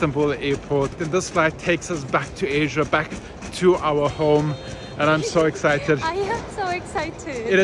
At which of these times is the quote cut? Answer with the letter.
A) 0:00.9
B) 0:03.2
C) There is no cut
A